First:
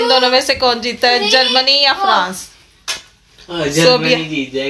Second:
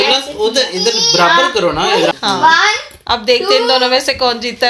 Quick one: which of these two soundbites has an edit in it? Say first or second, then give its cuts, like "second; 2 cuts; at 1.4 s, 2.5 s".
second; 1 cut; at 2.1 s